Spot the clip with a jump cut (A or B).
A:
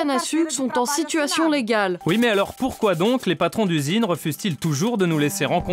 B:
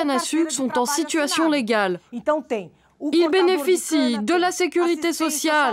A